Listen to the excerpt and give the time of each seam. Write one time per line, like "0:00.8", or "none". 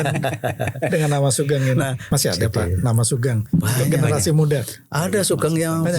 0:02.0